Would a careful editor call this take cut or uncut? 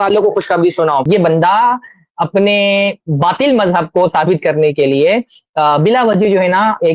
cut